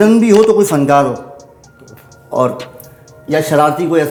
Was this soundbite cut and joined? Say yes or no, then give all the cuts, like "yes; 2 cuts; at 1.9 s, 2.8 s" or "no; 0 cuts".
no; 0 cuts